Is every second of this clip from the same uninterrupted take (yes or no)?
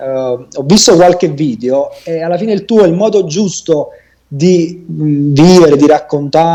yes